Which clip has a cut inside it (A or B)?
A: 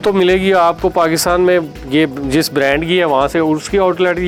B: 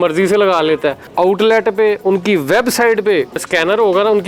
B